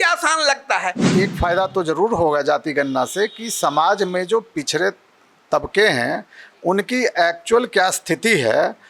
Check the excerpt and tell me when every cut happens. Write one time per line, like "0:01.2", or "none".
0:01.1